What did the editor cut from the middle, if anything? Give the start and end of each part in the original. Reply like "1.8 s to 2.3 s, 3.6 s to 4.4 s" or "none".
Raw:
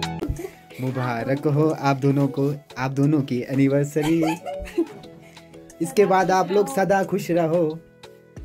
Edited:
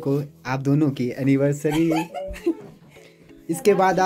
none